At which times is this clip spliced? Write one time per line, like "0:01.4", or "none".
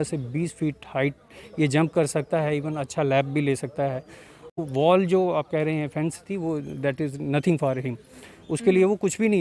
0:04.5